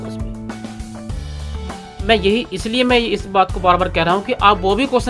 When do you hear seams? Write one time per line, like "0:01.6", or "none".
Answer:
0:01.9